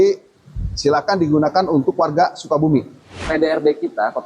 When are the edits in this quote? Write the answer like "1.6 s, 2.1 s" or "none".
3.2 s